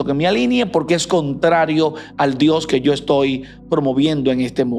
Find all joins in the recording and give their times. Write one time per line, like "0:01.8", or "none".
none